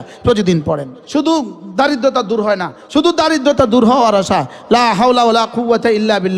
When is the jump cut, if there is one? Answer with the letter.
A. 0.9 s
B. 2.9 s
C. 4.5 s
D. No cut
A